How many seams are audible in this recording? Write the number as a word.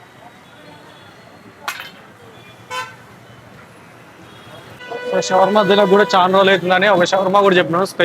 one